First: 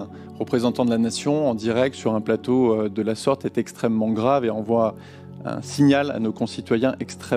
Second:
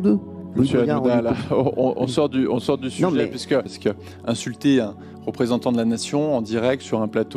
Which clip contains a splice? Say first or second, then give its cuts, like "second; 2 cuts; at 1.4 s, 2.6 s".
second; 1 cut; at 3.7 s